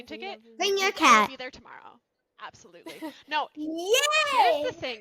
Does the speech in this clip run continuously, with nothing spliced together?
yes; 0 cuts

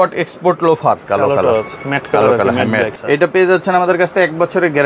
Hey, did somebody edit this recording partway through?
yes; 2 cuts; at 1.0 s, 3.0 s

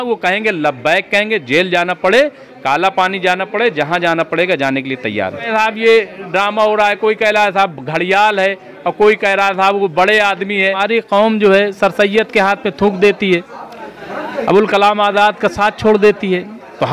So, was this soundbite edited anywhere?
yes; 2 cuts; at 5.4 s, 10.7 s

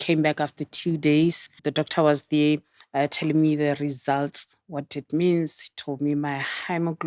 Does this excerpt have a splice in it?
yes; 2 cuts; at 1.6 s, 2.8 s

